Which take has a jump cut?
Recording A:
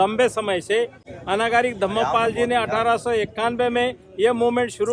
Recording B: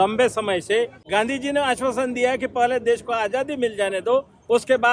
B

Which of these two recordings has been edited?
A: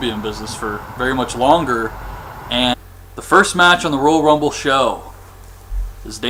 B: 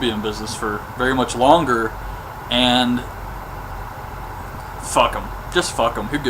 B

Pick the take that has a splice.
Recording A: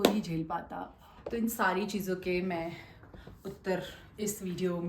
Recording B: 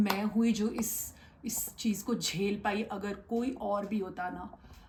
A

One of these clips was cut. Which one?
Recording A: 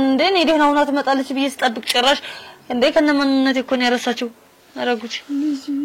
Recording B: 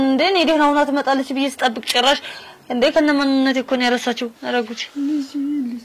B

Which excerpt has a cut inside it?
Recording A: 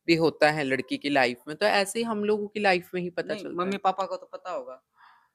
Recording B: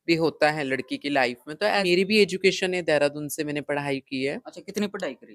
B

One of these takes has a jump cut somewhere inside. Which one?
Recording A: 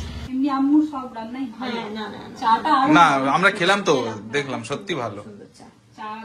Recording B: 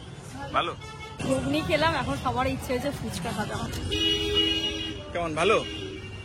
B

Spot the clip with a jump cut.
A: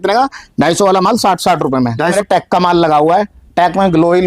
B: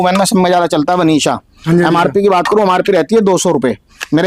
A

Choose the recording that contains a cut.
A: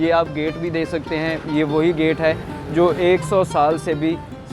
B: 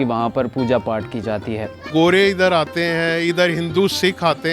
B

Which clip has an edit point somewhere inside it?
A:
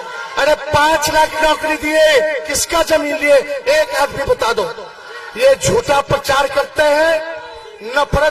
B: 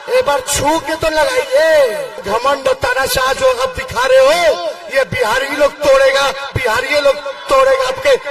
B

